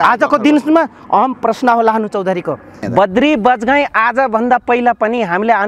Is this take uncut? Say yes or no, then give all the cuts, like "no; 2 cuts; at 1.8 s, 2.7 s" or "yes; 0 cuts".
no; 1 cut; at 2.8 s